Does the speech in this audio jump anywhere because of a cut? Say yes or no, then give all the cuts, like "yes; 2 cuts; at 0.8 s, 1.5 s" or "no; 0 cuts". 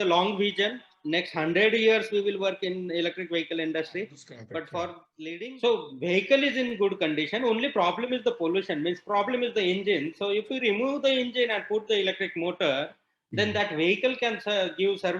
yes; 1 cut; at 5.1 s